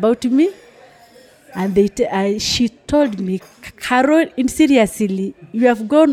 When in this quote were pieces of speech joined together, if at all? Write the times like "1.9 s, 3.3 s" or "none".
none

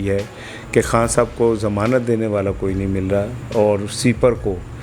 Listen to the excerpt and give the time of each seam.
none

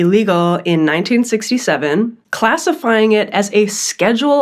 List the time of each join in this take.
2.2 s

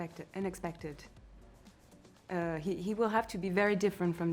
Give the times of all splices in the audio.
none

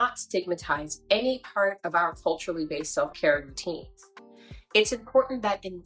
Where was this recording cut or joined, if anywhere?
none

